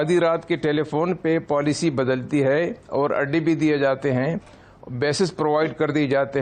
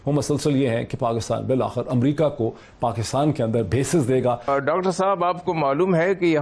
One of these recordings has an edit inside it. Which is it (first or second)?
second